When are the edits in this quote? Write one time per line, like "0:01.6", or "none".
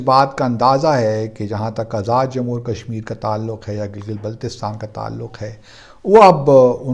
none